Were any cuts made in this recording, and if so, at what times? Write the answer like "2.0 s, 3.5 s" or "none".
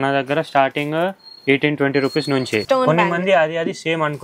2.6 s